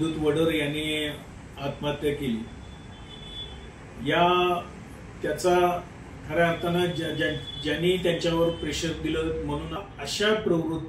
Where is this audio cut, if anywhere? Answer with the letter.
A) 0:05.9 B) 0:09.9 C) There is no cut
B